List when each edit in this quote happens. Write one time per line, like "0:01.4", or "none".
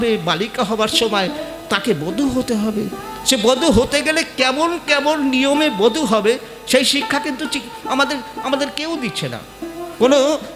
none